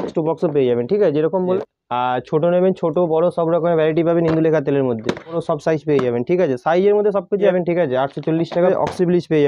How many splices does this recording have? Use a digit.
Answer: 4